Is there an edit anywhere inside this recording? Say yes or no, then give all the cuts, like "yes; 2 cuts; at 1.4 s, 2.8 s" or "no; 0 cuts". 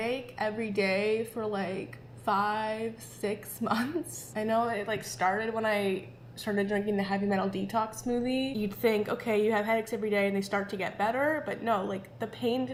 no; 0 cuts